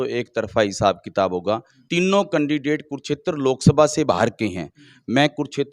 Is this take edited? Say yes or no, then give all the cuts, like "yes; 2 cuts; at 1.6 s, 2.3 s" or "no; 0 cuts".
yes; 1 cut; at 1.8 s